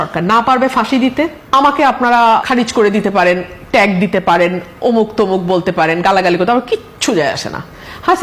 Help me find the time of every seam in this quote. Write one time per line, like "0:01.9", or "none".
0:01.4
0:02.5